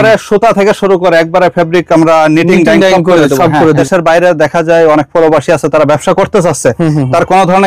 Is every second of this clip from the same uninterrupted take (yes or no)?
no